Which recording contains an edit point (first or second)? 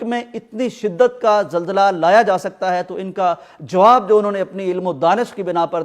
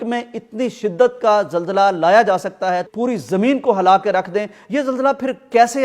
second